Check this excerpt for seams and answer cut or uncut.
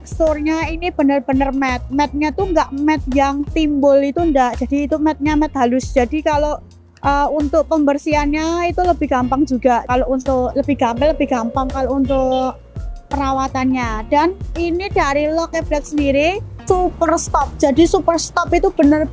uncut